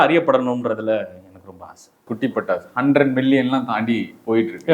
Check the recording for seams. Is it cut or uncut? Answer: uncut